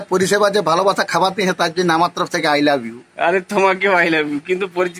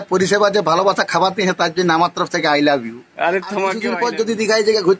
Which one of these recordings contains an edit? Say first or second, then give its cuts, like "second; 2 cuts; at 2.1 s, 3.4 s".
second; 1 cut; at 3.9 s